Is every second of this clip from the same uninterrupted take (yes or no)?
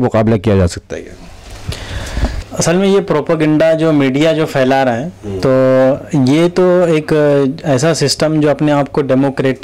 yes